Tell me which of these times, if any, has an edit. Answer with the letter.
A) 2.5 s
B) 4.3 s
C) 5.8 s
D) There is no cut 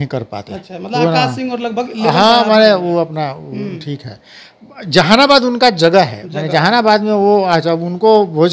D